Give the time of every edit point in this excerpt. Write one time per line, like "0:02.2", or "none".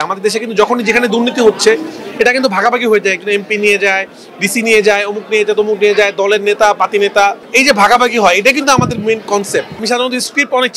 0:07.4
0:09.8